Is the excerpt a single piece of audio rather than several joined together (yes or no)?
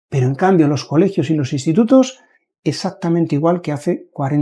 yes